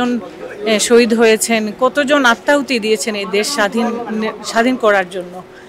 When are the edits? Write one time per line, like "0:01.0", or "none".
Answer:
none